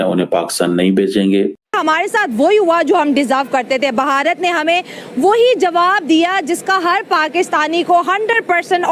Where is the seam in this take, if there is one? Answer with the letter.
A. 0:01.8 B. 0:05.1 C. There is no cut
A